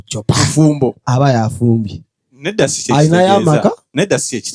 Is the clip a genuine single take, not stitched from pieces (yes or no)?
yes